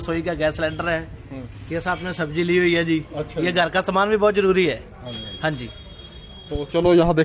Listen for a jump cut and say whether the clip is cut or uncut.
uncut